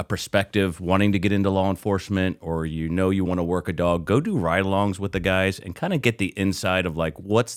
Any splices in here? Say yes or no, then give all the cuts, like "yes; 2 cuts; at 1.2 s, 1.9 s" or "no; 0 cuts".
no; 0 cuts